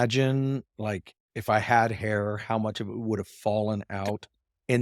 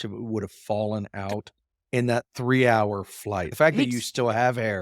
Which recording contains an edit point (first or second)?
second